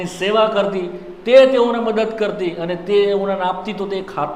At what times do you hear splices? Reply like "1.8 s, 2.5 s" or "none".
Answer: none